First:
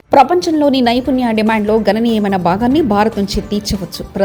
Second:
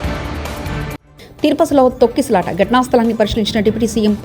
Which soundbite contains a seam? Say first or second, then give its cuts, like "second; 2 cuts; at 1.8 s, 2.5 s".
second; 1 cut; at 1.0 s